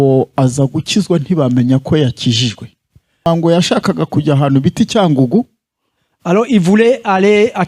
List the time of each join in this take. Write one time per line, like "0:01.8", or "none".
0:03.2